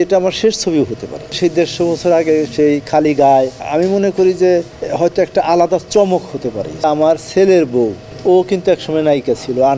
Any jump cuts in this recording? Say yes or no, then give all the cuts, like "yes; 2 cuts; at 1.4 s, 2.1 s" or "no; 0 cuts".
yes; 5 cuts; at 1.4 s, 3.6 s, 4.8 s, 6.8 s, 8.1 s